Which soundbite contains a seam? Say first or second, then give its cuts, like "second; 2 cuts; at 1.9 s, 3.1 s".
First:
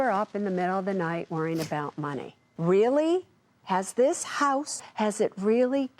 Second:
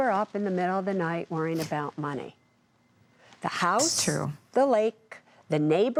first; 2 cuts; at 2.5 s, 4.7 s